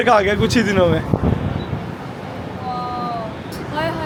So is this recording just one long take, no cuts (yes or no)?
yes